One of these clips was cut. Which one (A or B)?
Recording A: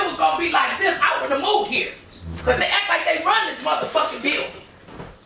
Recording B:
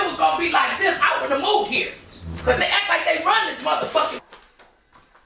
B